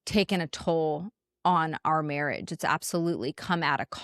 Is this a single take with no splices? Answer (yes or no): yes